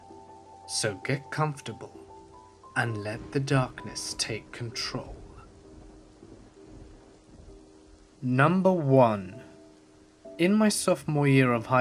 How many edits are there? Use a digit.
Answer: 1